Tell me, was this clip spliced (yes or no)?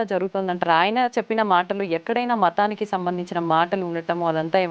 no